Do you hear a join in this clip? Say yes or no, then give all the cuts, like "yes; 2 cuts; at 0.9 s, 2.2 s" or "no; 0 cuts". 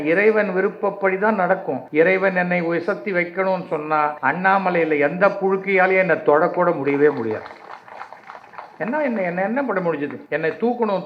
yes; 3 cuts; at 1.8 s, 4.2 s, 10.2 s